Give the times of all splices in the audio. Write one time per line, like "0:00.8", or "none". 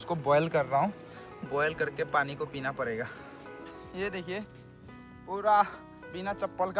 0:03.7